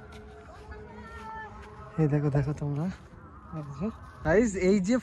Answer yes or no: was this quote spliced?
yes